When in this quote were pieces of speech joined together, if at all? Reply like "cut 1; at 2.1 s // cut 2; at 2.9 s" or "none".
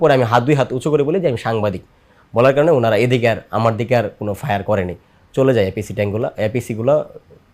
none